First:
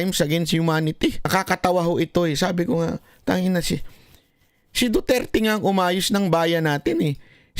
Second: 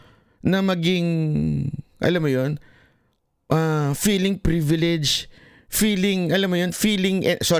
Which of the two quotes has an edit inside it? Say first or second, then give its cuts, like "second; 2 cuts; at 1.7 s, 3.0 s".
first; 1 cut; at 1.3 s